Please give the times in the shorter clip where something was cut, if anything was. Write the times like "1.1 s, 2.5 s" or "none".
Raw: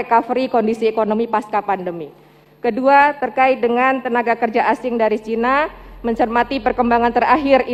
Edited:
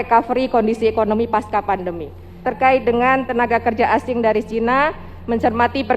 2.5 s

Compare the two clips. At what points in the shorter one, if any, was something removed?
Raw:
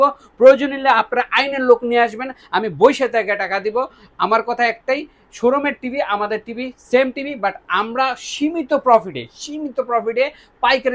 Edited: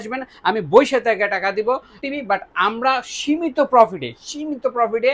2.0 s

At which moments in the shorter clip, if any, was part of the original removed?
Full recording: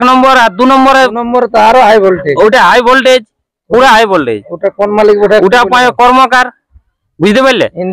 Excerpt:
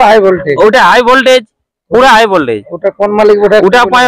none

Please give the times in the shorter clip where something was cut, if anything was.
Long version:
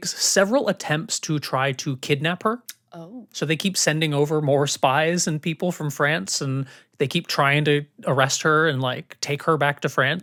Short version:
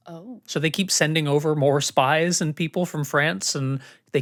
none

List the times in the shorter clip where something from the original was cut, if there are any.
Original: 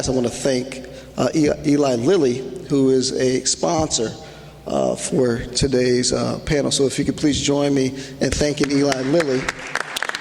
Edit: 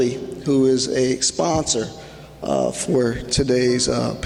none

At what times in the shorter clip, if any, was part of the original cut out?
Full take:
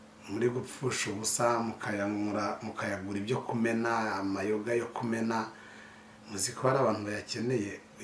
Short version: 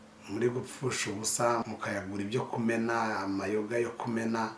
1.6 s

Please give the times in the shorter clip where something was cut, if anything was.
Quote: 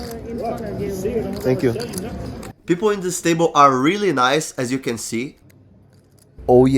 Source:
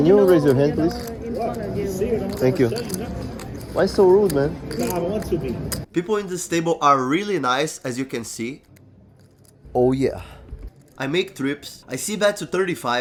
2.5 s

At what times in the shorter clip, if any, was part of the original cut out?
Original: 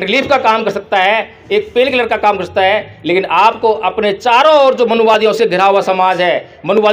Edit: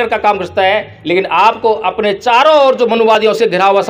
none

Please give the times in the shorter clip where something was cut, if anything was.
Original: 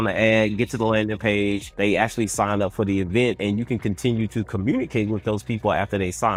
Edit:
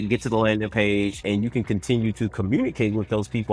1.2 s

